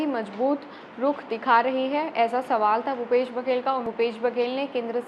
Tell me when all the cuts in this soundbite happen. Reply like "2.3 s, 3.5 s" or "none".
3.8 s